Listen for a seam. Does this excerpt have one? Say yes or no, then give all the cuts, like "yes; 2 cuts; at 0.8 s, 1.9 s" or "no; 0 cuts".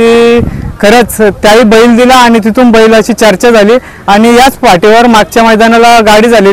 no; 0 cuts